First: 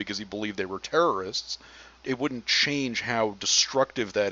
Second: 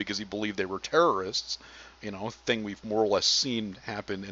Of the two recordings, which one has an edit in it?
first; 1 cut; at 2.0 s

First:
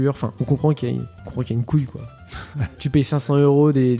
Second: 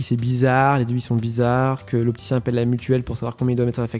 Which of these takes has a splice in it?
first; 2 cuts; at 1.2 s, 2.6 s

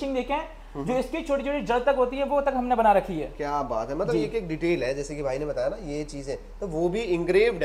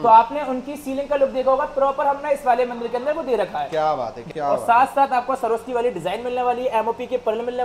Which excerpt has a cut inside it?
second; 1 cut; at 4.2 s

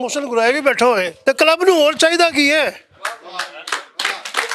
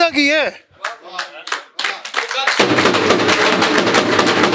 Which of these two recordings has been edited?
first; 1 cut; at 1.1 s

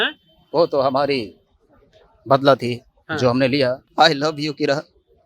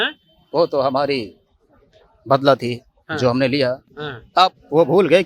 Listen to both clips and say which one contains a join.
first; 1 cut; at 3.8 s

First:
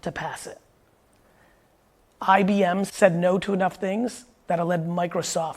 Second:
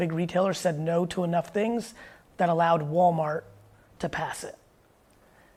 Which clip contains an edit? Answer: first; 1 cut; at 2.9 s

